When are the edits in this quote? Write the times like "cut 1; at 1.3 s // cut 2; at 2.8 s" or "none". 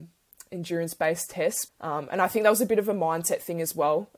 cut 1; at 1.6 s